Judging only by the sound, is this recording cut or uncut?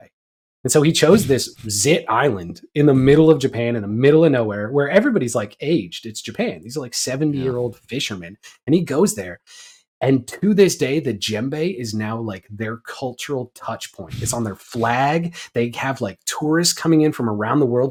uncut